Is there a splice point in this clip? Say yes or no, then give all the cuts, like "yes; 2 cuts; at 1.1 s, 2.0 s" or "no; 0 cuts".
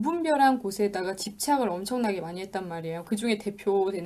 no; 0 cuts